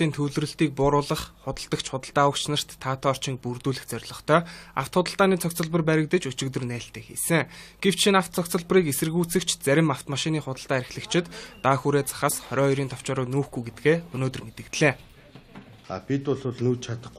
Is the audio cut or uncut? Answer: uncut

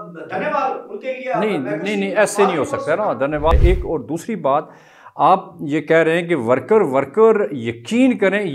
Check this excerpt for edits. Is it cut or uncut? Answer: cut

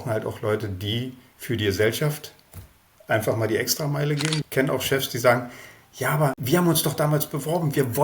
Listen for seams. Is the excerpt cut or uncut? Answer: cut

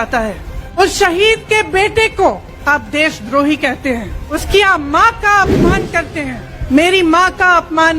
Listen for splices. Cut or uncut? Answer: cut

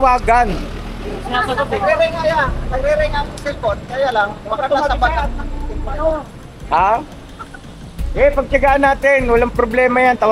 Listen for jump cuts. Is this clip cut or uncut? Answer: uncut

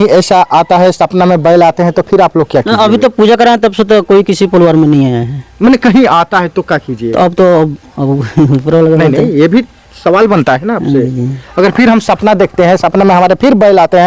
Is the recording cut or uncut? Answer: uncut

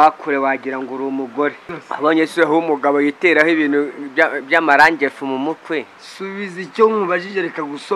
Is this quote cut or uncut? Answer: cut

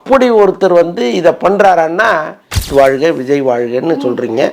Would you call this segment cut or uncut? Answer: cut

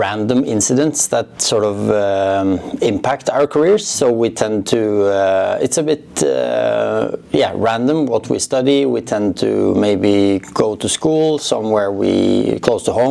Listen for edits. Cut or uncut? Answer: uncut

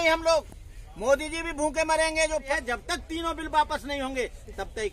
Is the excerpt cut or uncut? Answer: cut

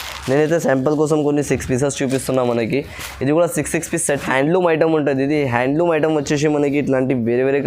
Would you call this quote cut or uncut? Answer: cut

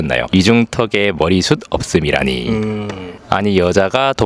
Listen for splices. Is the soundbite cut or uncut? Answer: uncut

